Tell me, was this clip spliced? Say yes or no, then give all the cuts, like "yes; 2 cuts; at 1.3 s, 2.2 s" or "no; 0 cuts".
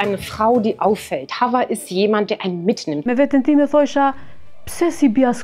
yes; 1 cut; at 2.9 s